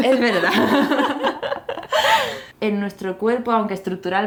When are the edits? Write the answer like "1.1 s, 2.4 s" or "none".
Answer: none